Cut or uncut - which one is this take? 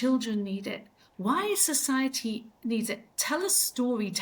uncut